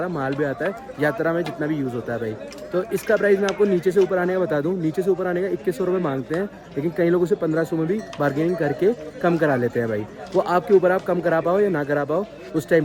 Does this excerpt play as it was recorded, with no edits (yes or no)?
yes